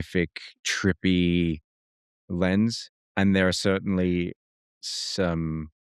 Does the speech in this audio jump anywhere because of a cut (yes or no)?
no